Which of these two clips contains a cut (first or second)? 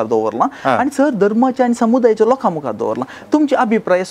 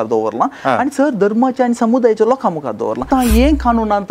second